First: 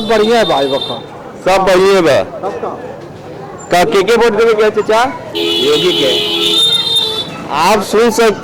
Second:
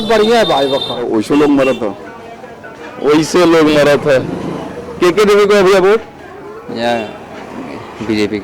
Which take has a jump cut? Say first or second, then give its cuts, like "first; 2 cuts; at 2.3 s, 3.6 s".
second; 1 cut; at 1.0 s